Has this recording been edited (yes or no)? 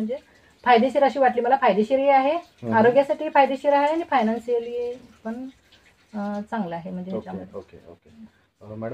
no